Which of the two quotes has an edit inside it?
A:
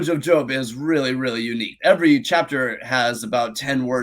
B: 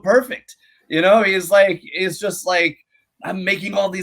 A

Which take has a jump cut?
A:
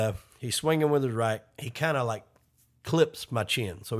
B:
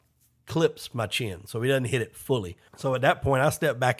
B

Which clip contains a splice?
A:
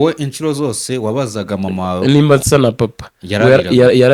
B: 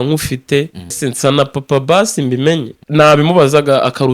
B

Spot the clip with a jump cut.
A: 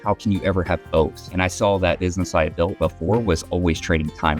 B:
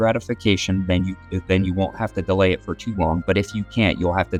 A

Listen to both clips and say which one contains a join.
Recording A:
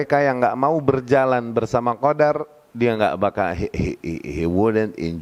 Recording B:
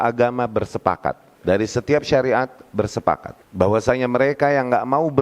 B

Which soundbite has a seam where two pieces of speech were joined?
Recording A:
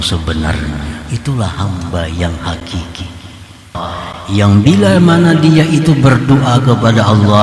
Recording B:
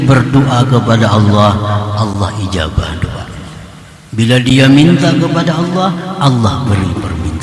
A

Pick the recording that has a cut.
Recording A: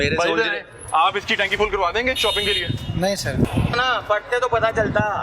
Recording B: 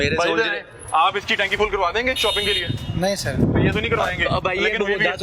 A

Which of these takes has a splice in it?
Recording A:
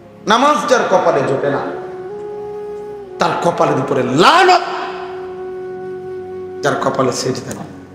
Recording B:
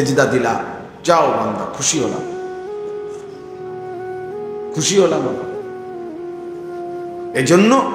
A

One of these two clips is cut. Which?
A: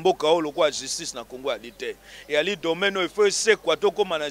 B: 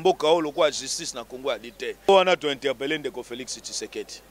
B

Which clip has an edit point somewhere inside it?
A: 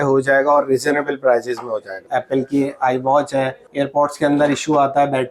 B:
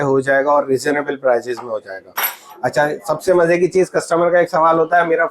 A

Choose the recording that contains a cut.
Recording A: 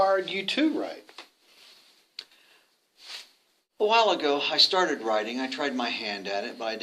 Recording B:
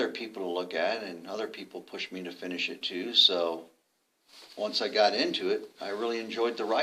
A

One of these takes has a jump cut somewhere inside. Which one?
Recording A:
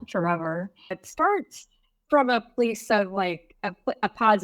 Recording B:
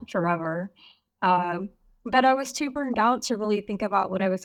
A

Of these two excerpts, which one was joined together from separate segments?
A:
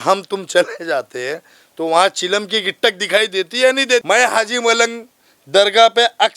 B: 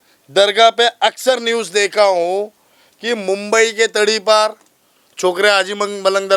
A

